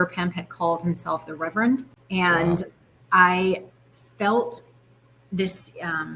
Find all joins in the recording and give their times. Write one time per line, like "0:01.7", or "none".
0:02.0